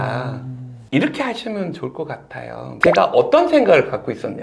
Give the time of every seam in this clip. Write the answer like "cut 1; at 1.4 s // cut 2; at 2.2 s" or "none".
cut 1; at 2.7 s